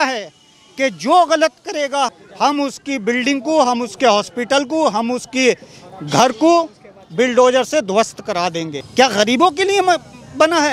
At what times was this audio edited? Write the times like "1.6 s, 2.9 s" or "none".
8.8 s